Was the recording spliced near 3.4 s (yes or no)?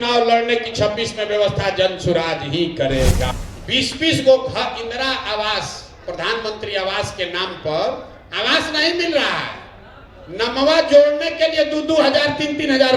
yes